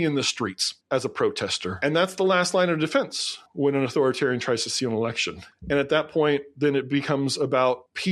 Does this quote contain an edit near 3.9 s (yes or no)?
no